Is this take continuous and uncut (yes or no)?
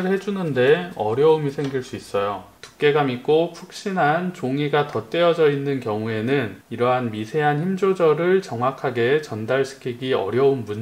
no